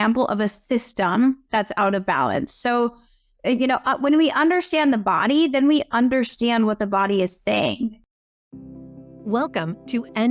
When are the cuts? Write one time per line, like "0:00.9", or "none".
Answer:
0:08.0